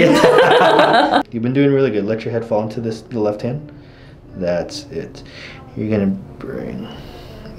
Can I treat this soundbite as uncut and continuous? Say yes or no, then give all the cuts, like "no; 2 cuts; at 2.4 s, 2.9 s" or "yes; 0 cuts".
no; 1 cut; at 1.2 s